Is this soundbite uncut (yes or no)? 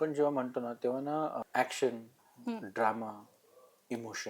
no